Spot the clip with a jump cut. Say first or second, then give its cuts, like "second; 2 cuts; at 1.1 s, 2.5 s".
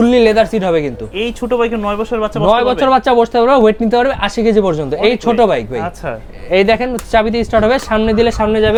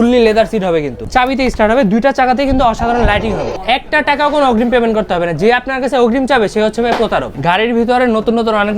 second; 3 cuts; at 1.0 s, 3.5 s, 7.3 s